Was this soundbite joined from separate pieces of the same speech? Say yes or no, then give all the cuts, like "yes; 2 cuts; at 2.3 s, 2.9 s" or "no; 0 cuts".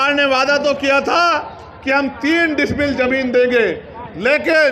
no; 0 cuts